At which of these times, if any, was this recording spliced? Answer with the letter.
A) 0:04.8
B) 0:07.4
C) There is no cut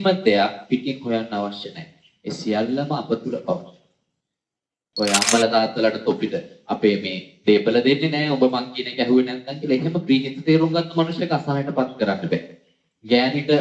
A